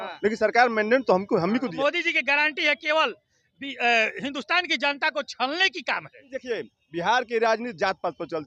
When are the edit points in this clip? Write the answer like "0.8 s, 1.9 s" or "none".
1.7 s, 6.2 s